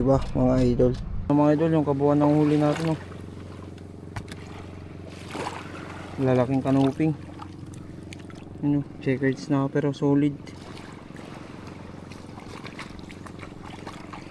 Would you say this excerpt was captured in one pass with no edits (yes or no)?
no